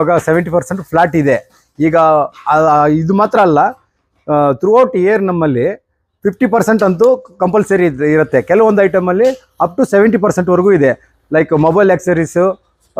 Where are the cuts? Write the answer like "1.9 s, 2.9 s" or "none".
none